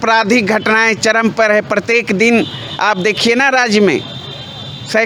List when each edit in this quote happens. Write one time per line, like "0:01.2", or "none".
none